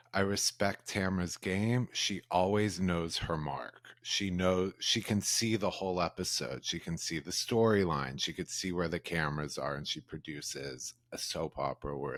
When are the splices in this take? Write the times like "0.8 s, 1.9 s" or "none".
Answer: none